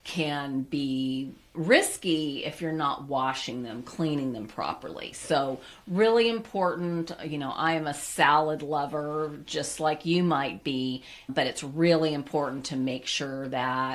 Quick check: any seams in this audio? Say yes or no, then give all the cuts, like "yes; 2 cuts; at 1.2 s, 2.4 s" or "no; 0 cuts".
no; 0 cuts